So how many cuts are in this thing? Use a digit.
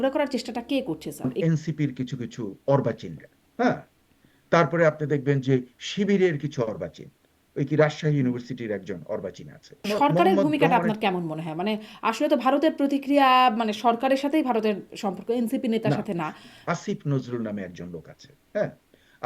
3